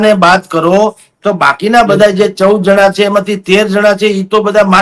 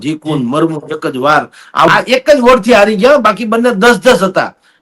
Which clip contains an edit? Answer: second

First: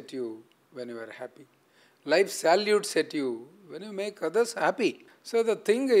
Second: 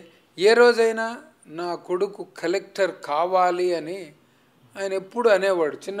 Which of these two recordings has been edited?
first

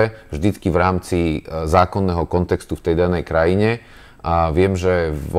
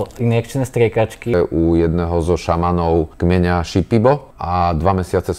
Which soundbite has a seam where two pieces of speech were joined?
second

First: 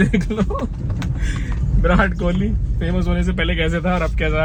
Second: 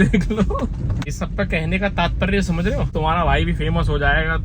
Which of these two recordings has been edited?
second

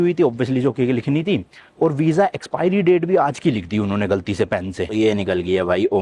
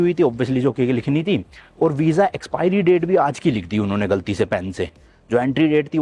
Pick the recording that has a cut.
first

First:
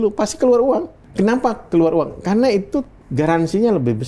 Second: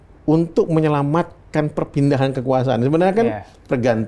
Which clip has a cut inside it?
first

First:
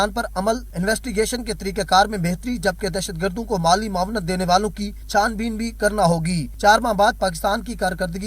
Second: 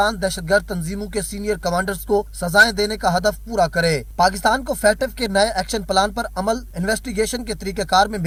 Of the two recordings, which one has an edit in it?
first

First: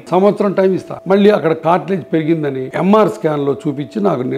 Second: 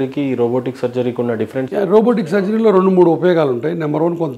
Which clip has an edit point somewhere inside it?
first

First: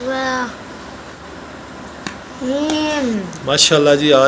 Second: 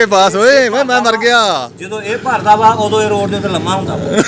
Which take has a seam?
first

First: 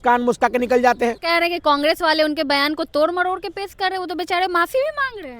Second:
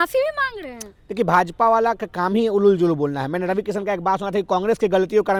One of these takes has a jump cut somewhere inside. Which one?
first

